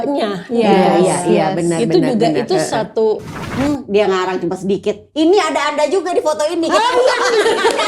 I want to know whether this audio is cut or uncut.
cut